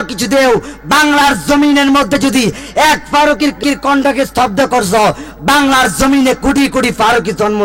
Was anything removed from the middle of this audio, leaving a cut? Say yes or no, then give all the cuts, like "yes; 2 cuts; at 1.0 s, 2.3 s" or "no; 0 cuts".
yes; 1 cut; at 3.6 s